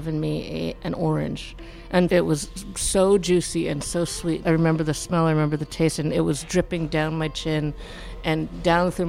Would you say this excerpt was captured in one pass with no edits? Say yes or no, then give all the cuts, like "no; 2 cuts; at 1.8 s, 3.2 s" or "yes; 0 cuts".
no; 3 cuts; at 2.1 s, 4.4 s, 6.7 s